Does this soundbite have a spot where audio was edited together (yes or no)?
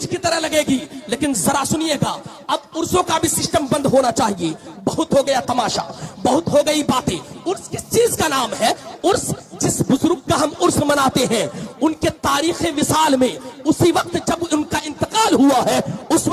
no